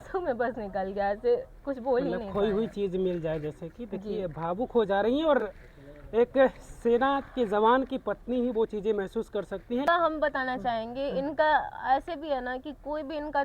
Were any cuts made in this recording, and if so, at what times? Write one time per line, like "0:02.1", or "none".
none